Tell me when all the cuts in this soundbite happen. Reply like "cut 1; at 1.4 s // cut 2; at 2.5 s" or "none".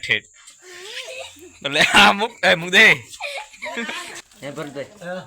cut 1; at 4.2 s